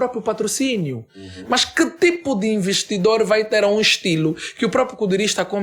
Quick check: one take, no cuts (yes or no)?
yes